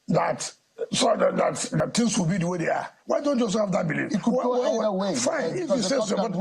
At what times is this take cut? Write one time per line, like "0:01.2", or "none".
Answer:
0:01.8